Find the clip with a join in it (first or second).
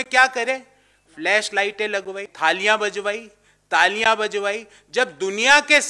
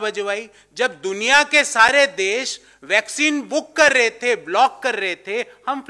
first